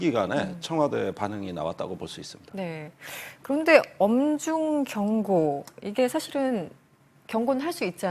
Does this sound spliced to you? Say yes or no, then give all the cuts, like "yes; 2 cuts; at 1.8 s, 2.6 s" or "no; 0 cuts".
no; 0 cuts